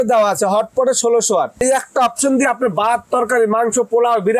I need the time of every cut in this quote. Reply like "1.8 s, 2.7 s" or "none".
1.6 s